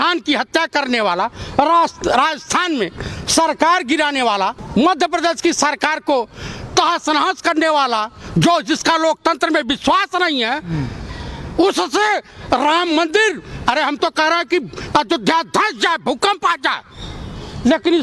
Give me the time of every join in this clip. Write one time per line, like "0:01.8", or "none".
0:04.6